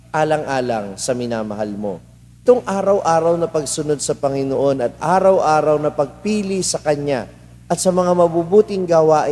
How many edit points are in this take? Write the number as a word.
one